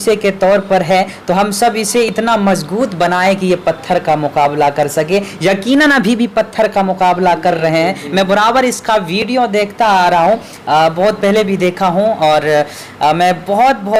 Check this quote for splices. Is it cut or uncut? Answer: uncut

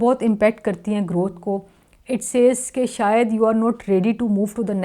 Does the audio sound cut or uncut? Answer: uncut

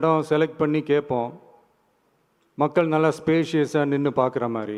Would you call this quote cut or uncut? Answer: uncut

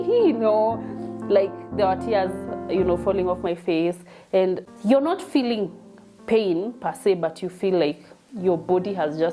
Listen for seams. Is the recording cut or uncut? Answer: cut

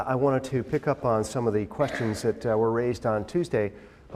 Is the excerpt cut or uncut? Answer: uncut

